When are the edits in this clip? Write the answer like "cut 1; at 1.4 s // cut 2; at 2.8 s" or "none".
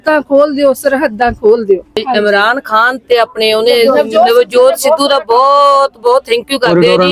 cut 1; at 2.0 s